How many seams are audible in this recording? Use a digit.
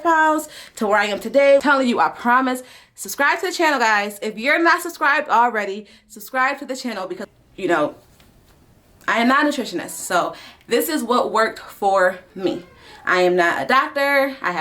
2